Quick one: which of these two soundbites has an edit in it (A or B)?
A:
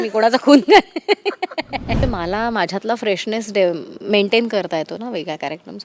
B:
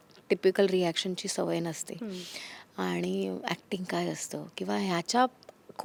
A